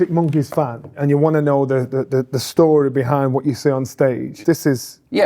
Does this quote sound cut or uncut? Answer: cut